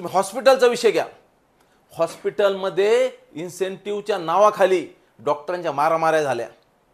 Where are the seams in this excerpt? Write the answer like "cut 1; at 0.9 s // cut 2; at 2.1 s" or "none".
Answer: none